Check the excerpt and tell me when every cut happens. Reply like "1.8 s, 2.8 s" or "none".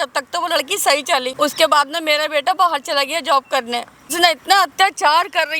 1.3 s, 4.1 s